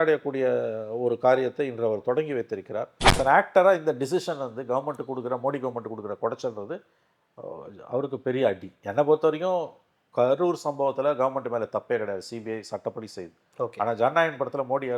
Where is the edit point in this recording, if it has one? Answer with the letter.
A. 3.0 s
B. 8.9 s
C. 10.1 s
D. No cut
A